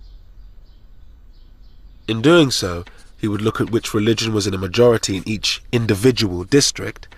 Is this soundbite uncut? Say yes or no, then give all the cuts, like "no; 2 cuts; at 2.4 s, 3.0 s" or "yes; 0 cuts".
yes; 0 cuts